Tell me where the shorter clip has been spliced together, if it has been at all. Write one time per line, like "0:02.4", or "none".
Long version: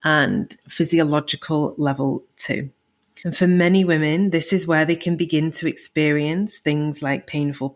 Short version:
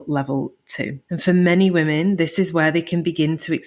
0:01.0